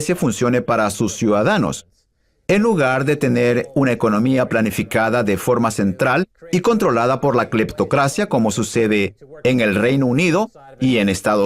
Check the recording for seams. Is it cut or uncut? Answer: uncut